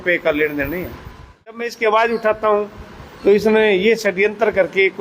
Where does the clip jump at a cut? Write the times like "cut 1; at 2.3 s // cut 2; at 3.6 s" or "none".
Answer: cut 1; at 1.7 s